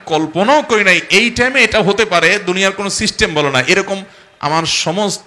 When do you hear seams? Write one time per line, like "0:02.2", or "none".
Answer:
none